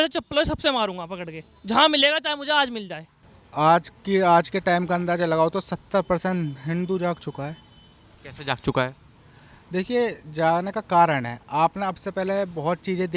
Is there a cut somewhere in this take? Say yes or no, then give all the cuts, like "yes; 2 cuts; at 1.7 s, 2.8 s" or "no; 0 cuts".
no; 0 cuts